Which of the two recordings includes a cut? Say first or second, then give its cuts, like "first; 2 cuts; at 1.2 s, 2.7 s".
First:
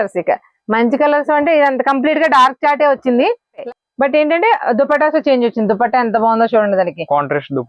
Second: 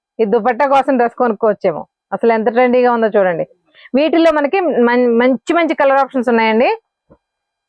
first; 1 cut; at 3.6 s